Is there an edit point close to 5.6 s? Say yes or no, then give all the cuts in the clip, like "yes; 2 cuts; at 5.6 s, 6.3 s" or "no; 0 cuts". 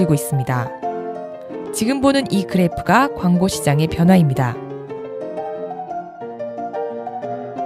no; 0 cuts